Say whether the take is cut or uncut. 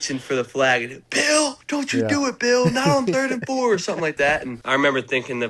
cut